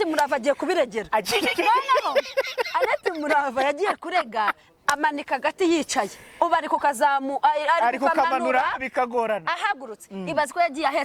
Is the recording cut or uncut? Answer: uncut